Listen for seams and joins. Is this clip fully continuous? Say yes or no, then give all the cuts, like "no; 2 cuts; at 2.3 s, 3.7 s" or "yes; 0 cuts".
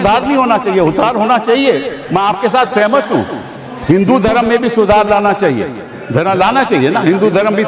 yes; 0 cuts